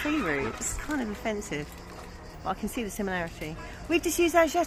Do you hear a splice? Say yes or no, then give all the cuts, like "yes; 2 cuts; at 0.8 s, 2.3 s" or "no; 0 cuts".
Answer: no; 0 cuts